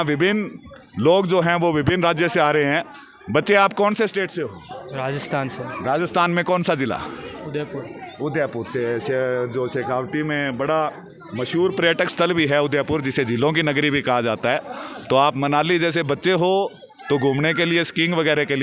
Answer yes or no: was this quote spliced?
no